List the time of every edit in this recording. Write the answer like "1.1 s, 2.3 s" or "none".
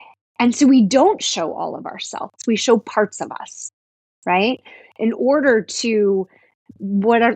2.2 s